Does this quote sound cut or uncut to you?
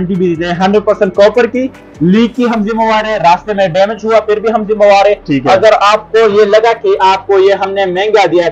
uncut